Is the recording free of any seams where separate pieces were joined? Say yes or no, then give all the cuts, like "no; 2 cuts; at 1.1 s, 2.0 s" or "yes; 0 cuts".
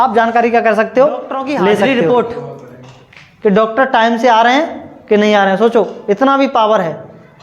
no; 1 cut; at 1.8 s